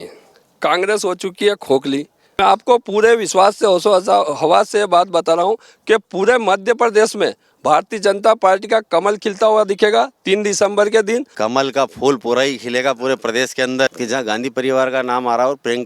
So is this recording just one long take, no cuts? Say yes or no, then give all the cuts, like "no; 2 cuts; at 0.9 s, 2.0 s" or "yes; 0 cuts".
no; 3 cuts; at 2.2 s, 11.3 s, 13.9 s